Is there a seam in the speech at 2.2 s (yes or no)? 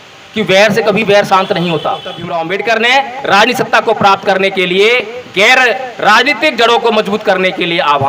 yes